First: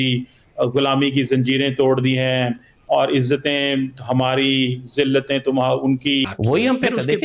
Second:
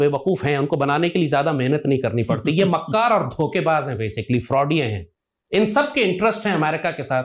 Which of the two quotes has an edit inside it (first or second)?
first